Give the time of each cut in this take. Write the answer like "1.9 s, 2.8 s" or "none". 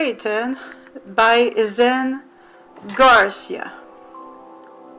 none